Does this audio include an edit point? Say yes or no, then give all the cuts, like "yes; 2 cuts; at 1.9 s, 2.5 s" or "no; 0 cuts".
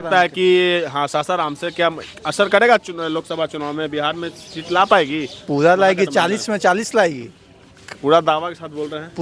no; 0 cuts